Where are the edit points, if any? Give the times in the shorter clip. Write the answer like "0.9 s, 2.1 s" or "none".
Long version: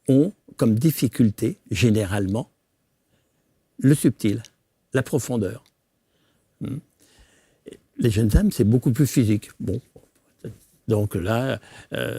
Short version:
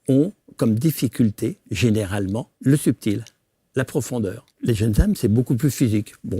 2.5 s, 4.5 s